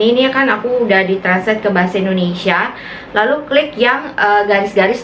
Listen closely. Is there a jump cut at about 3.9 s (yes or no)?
no